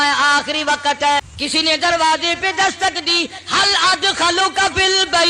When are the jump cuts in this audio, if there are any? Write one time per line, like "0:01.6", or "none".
0:01.3